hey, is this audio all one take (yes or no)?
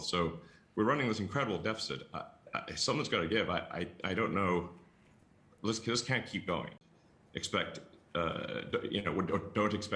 yes